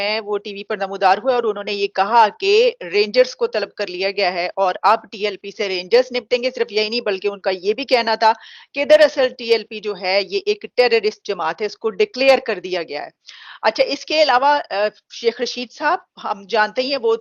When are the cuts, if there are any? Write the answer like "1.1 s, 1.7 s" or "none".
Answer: none